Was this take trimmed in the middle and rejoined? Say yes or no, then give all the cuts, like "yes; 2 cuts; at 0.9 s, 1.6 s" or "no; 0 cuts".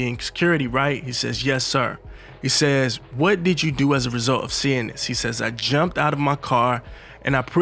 no; 0 cuts